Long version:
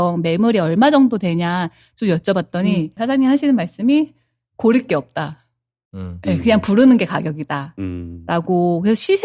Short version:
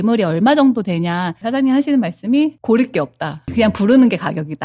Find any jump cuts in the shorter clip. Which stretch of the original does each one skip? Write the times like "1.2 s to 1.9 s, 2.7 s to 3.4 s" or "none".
1.7 s to 2.9 s, 4.1 s to 4.5 s, 5.5 s to 6.4 s